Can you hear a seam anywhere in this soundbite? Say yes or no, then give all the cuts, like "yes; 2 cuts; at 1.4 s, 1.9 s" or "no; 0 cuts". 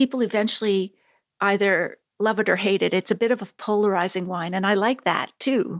no; 0 cuts